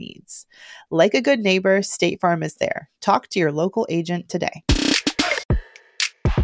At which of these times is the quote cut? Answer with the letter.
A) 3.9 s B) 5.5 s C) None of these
B